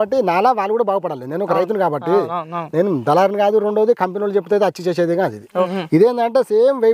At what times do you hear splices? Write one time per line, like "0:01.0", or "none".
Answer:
0:05.8